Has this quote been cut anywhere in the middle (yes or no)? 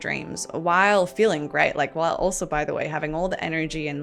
no